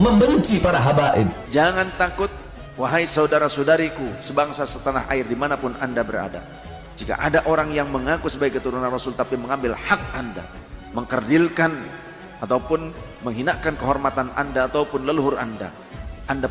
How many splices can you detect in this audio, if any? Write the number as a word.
zero